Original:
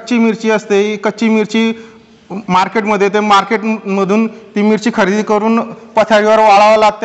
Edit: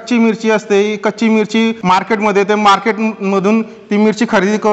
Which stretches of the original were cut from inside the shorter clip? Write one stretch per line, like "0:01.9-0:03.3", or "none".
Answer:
0:01.8-0:02.4